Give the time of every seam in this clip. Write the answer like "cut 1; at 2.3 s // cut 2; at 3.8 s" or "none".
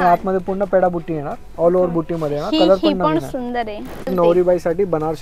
cut 1; at 4.1 s